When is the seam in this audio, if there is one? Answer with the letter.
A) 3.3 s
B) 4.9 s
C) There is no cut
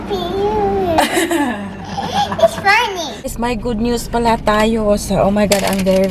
A